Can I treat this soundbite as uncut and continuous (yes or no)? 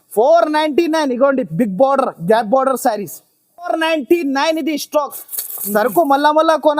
no